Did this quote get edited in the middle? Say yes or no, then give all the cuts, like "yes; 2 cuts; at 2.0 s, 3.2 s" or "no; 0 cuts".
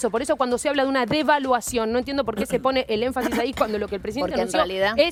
no; 0 cuts